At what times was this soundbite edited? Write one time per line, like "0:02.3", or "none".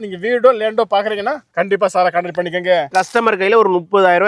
0:02.9

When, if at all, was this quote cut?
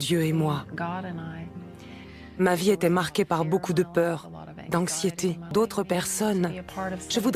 0:05.5

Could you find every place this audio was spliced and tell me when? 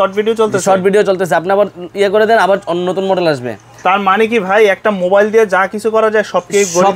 none

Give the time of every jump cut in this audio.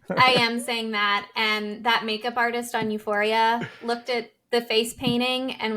0:04.2

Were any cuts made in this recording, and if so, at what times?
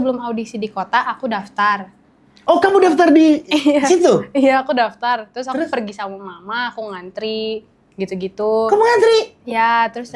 none

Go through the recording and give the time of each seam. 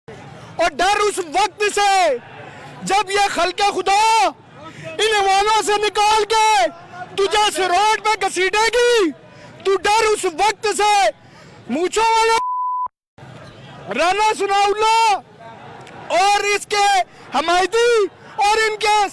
none

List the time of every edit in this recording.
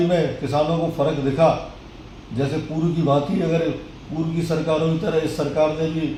none

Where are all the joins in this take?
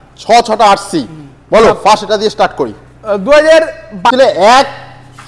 0:04.1

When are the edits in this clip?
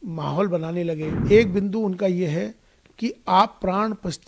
0:01.1

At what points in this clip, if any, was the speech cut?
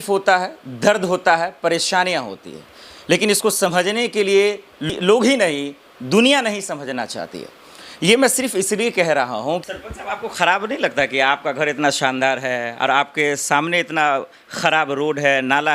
0:04.9
0:09.6

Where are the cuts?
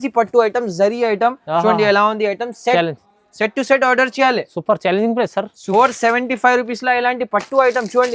0:05.6

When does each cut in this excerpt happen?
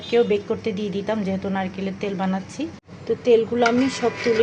0:02.9

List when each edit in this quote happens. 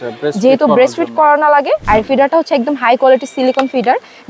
0:01.8

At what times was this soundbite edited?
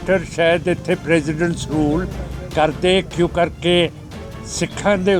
none

